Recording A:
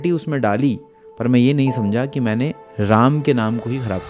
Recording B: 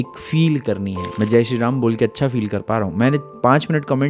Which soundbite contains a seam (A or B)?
B